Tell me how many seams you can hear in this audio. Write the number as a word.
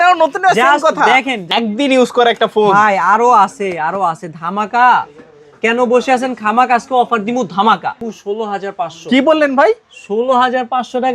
two